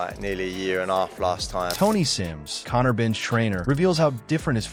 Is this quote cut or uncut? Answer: uncut